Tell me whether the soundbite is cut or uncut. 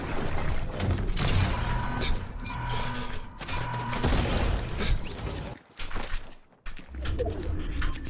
cut